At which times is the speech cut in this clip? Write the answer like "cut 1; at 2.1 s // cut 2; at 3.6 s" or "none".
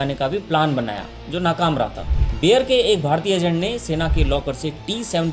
cut 1; at 2.0 s